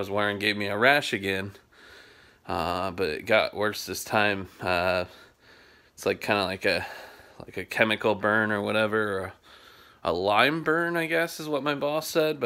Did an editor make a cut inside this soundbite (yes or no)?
no